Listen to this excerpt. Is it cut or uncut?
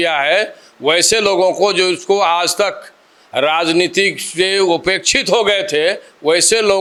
uncut